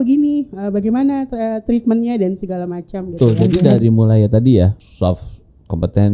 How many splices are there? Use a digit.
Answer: 2